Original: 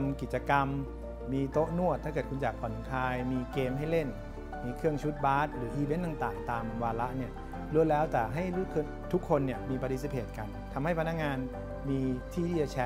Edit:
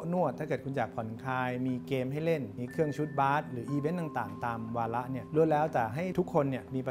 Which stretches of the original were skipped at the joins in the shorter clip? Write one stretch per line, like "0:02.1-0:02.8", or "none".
0:04.2-0:04.6
0:07.3-0:07.6
0:08.5-0:09.1